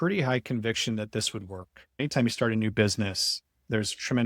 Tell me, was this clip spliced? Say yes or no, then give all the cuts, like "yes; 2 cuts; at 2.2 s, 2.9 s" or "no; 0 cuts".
yes; 1 cut; at 2.0 s